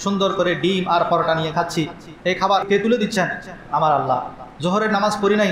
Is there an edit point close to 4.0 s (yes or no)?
no